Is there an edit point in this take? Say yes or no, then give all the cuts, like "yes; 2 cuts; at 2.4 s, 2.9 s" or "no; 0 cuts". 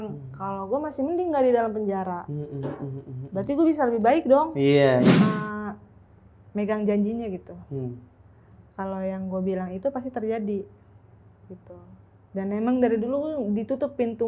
yes; 1 cut; at 5.1 s